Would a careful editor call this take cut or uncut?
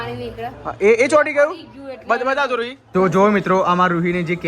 cut